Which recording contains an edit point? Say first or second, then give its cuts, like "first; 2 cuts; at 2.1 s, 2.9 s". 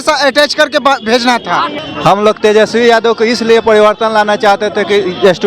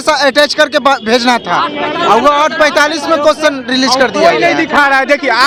first; 1 cut; at 1.8 s